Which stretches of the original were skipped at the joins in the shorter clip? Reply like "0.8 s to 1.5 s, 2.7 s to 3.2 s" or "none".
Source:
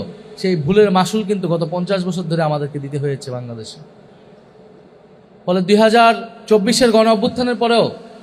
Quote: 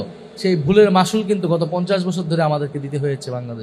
none

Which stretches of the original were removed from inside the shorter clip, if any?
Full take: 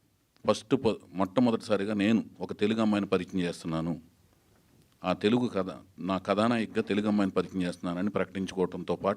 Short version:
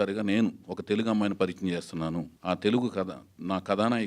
4.1 s to 4.9 s

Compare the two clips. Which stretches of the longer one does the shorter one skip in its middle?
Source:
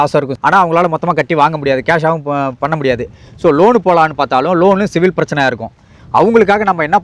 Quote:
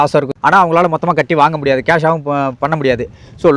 none

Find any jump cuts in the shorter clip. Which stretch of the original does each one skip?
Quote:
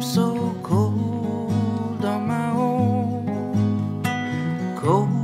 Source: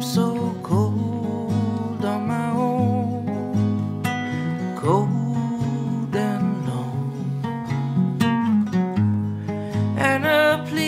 none

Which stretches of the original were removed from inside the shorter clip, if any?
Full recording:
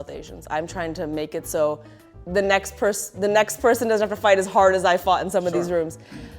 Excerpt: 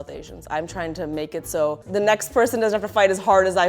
1.8 s to 3.1 s

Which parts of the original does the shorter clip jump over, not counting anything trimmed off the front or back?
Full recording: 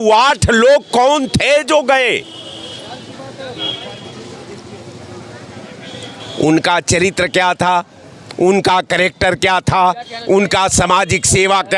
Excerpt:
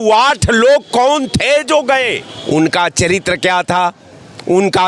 2.3 s to 6.2 s

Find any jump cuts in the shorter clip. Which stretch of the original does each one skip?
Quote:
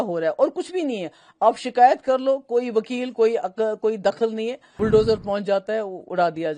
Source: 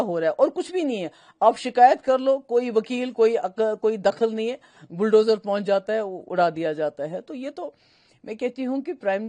4.6 s to 4.8 s

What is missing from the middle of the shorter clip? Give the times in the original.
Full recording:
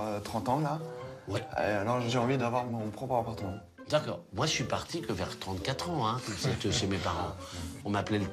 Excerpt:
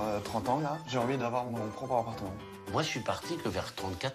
0.9 s to 2.1 s, 3.8 s to 4.2 s

